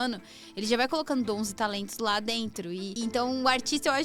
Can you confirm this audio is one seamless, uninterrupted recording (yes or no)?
no